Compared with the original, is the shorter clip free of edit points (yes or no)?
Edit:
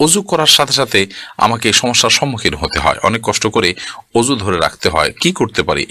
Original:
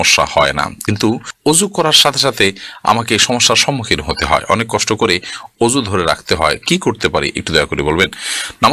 yes